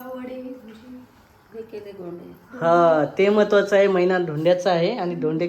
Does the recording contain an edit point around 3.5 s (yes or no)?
no